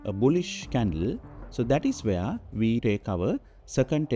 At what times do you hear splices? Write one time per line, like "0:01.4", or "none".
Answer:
0:02.8